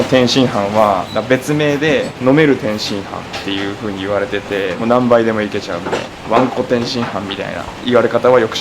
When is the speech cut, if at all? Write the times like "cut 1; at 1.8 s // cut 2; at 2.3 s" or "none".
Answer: cut 1; at 1.1 s // cut 2; at 2.1 s // cut 3; at 4.8 s // cut 4; at 6.1 s